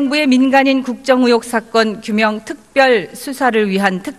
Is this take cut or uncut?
cut